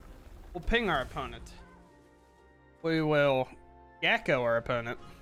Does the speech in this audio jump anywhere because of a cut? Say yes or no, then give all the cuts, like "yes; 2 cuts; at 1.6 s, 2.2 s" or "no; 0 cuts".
no; 0 cuts